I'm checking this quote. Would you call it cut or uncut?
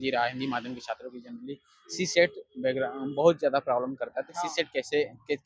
uncut